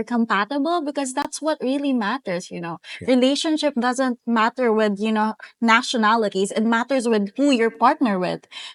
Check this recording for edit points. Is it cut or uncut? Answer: uncut